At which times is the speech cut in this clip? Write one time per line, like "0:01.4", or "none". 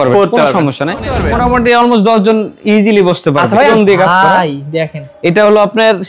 0:01.2
0:03.7